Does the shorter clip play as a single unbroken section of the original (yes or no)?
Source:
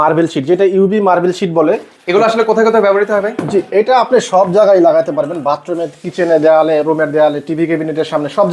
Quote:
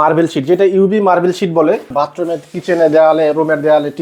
no